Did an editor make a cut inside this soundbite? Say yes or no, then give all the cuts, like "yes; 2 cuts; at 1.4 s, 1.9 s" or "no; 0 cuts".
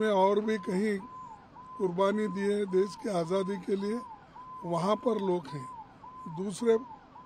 no; 0 cuts